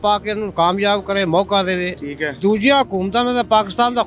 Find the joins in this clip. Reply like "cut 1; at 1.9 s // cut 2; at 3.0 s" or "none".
none